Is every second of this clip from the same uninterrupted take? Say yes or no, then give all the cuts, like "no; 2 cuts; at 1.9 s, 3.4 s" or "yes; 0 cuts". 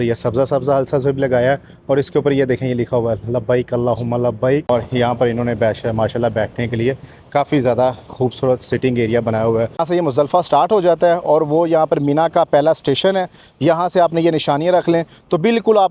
no; 2 cuts; at 4.7 s, 9.8 s